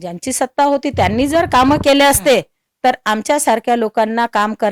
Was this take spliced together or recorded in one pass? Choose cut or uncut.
uncut